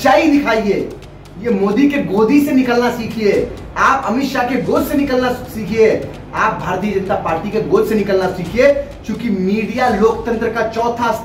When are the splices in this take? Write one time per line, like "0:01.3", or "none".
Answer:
none